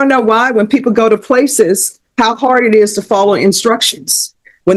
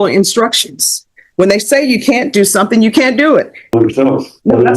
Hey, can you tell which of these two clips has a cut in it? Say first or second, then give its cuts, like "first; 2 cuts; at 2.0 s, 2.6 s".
second; 1 cut; at 3.7 s